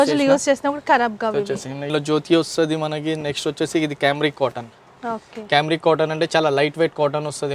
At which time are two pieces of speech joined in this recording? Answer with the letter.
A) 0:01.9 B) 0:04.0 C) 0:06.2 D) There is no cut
A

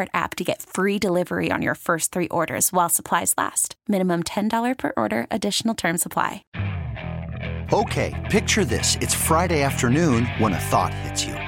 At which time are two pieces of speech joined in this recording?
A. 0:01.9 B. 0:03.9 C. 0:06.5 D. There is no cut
C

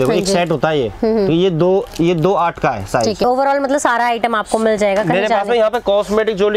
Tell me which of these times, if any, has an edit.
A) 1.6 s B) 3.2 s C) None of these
B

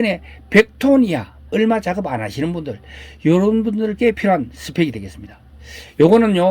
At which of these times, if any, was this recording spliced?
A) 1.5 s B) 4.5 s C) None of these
A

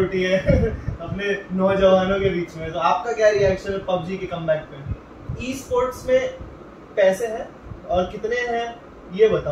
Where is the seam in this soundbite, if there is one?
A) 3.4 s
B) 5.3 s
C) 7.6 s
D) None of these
B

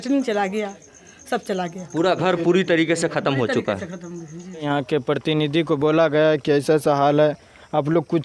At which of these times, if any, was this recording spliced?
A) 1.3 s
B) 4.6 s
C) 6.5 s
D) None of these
B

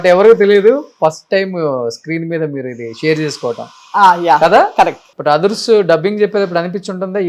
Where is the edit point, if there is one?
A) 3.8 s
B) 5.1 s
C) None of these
B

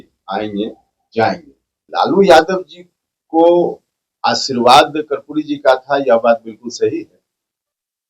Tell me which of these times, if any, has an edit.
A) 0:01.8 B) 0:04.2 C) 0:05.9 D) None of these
A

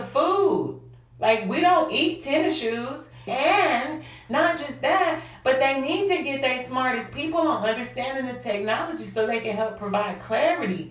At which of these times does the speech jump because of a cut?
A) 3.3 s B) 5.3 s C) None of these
A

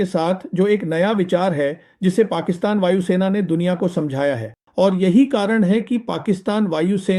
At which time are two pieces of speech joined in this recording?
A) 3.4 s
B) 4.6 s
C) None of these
B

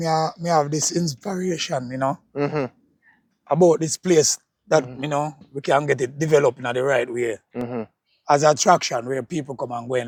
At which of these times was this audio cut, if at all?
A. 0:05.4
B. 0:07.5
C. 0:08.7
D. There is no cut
D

